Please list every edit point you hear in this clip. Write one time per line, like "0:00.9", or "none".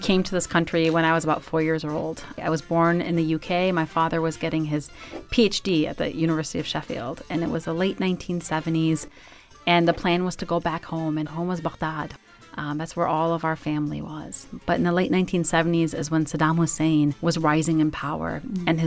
0:02.4

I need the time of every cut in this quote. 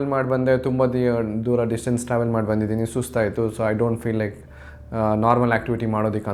none

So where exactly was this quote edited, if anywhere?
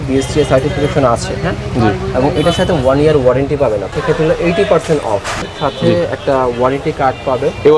0:03.9
0:05.4

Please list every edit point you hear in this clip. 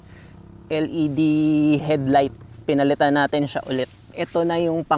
0:01.8
0:04.0

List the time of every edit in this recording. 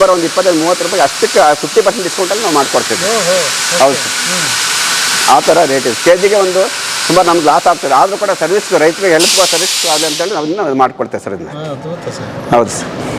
none

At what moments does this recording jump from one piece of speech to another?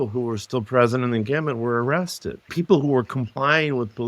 0:02.5

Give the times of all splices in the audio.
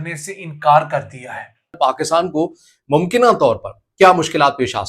0:02.0

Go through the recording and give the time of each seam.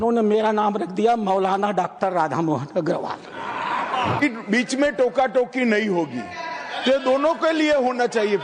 0:04.2

